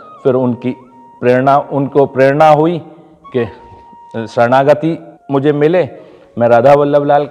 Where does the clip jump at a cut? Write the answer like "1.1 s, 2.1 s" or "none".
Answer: 5.1 s